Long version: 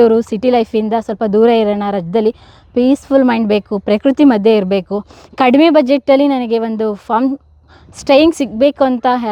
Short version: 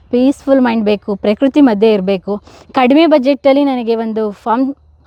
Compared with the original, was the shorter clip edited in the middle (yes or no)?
no